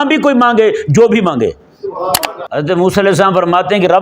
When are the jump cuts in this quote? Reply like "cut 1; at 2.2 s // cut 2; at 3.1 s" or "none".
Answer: cut 1; at 2.1 s